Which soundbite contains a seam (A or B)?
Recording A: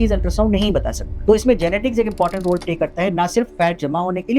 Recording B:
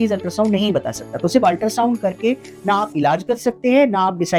A